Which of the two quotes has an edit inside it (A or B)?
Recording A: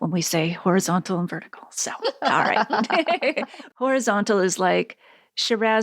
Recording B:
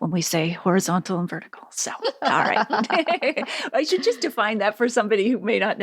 A